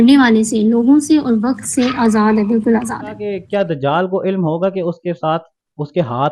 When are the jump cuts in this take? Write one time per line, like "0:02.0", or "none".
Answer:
0:03.3

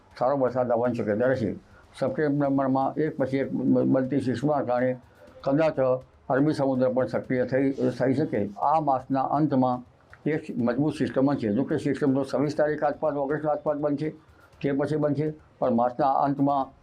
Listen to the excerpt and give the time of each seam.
0:08.6

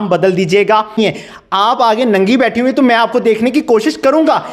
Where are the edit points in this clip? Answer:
0:01.1

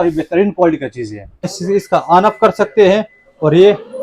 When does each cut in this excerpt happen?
0:01.5

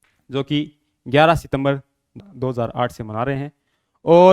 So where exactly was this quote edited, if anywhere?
0:02.1

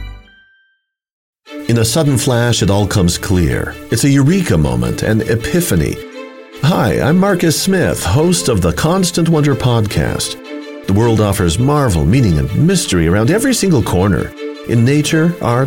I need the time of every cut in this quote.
0:01.3

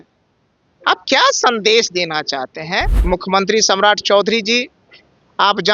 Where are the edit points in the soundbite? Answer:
0:02.9

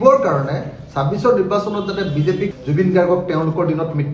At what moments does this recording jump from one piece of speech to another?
0:02.5

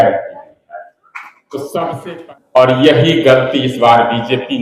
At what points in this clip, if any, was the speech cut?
0:02.0

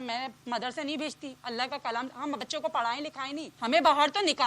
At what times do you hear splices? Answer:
0:03.5

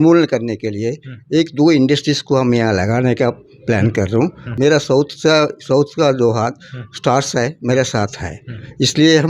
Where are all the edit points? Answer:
0:04.4

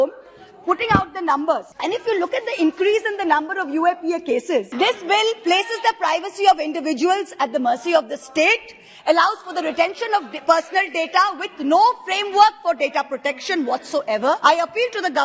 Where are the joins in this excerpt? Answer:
0:01.7
0:04.7
0:14.4

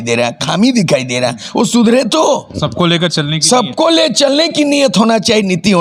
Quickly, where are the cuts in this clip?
none

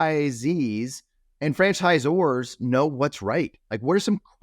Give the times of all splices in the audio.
0:01.2

